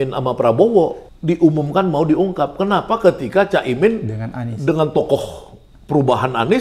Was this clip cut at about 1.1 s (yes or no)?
yes